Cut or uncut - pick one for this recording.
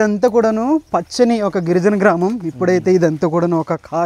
uncut